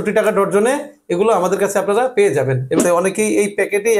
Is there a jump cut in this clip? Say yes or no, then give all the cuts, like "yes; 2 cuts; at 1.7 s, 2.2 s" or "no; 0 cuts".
yes; 1 cut; at 2.8 s